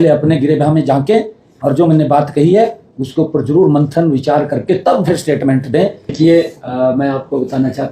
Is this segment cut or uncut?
cut